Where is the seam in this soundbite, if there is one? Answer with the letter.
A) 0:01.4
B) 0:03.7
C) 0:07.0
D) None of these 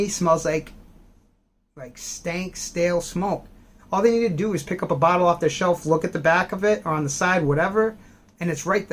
B